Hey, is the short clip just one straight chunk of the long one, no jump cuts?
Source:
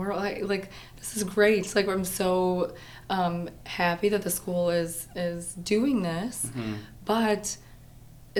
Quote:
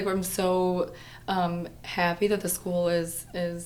yes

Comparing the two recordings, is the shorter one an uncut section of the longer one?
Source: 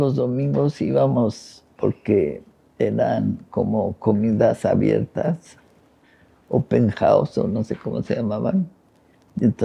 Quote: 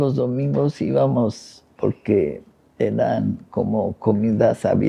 yes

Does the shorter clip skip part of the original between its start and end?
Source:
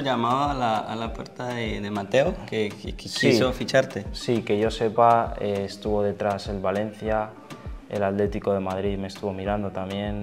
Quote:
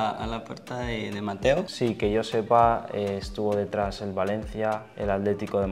yes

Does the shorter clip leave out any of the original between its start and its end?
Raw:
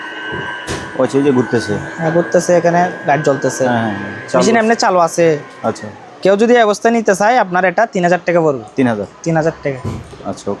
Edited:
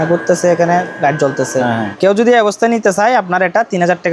yes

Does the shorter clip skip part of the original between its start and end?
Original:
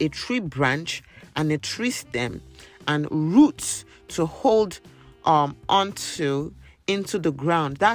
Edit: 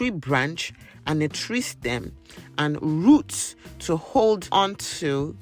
yes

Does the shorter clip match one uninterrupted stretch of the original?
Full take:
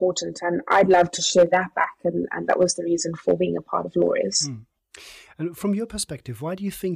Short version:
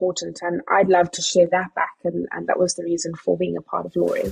yes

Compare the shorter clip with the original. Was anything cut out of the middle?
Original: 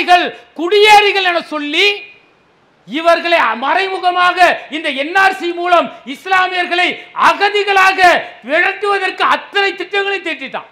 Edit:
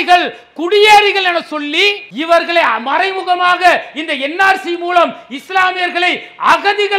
yes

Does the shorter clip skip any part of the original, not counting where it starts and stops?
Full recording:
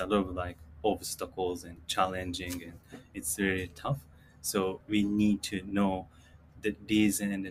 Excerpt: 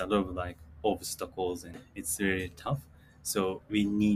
yes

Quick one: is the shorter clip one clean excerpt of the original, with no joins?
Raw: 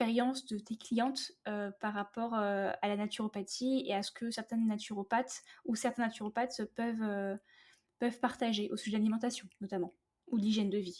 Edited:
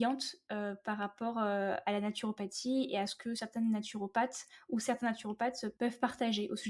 no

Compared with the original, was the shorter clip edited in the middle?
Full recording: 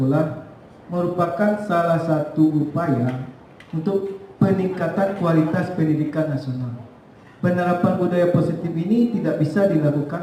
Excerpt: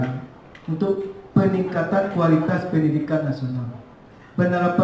no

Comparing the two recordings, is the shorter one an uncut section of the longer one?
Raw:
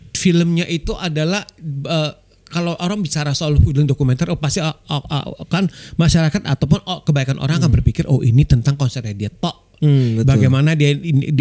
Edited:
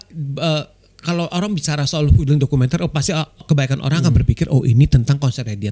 no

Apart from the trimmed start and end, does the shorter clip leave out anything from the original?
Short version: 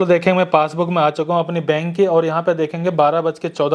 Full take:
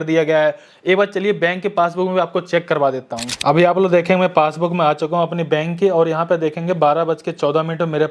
no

